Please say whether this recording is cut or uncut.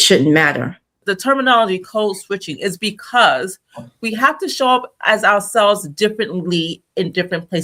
cut